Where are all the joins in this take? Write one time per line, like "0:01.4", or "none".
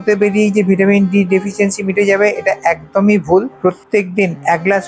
0:03.6